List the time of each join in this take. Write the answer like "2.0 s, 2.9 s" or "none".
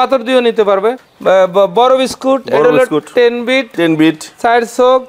1.0 s

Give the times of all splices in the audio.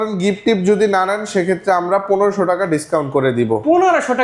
none

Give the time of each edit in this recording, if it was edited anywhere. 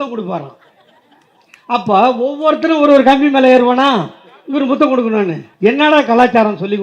5.4 s

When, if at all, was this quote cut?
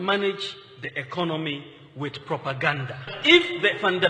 3.2 s

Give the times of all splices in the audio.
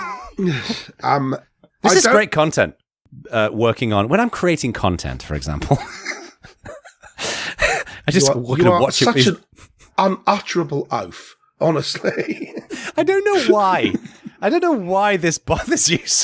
2.9 s

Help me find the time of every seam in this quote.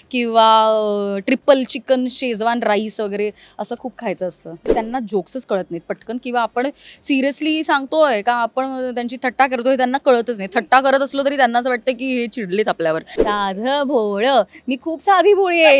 4.7 s, 13.1 s

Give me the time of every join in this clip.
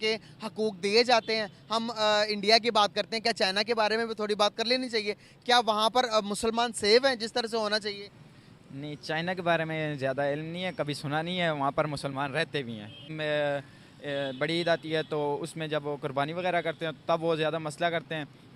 13.1 s

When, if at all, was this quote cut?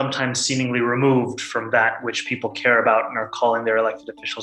none

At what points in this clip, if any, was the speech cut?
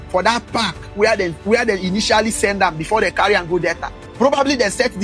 4.0 s

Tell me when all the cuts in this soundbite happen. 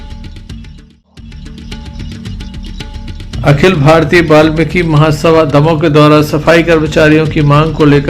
1.4 s, 3.2 s

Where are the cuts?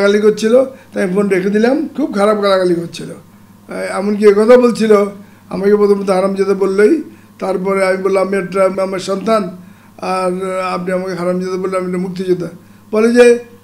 1.9 s, 8.7 s

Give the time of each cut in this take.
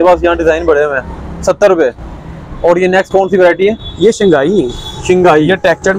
none

